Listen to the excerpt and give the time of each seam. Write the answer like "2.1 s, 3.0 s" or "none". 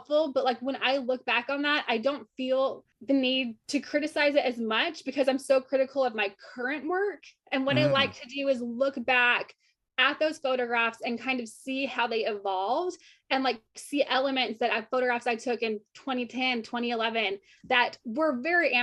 2.9 s, 3.6 s